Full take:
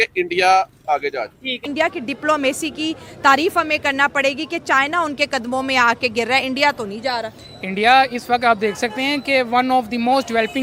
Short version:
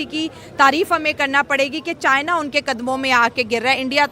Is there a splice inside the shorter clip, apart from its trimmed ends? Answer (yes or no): no